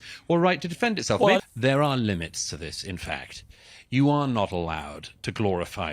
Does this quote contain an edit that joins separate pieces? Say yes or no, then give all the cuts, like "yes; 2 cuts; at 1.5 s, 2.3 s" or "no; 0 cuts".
yes; 1 cut; at 1.4 s